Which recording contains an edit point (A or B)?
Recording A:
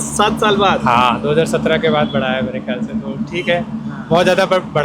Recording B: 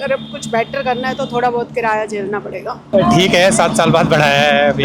B